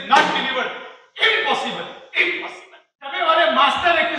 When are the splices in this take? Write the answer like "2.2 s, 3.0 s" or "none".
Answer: 3.2 s